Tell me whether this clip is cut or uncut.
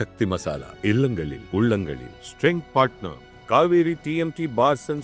uncut